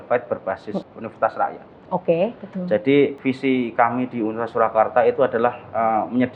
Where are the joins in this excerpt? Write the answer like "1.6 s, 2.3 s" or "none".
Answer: 0.9 s, 3.2 s